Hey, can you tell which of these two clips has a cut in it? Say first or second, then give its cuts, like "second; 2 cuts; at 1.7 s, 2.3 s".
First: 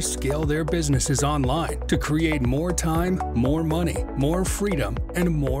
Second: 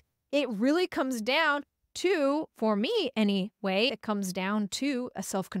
second; 1 cut; at 3.9 s